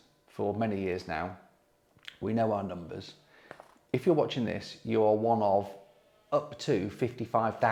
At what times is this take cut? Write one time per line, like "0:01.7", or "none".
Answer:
none